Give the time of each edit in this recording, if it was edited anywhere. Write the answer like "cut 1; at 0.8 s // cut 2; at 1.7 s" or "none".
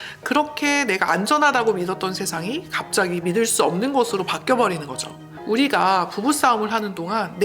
cut 1; at 5.5 s